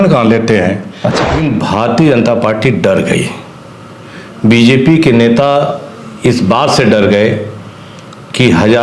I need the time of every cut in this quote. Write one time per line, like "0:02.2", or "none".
0:01.3